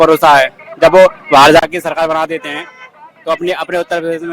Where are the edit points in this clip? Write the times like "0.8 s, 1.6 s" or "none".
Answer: none